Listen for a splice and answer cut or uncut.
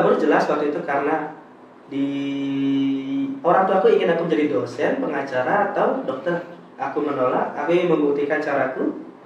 uncut